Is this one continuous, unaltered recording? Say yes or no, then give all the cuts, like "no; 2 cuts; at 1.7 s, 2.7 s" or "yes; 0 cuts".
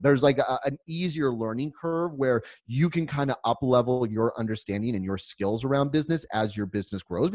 yes; 0 cuts